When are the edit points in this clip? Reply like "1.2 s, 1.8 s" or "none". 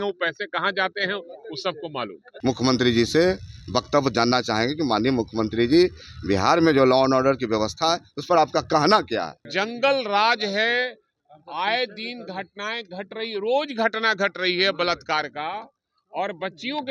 2.3 s, 9.4 s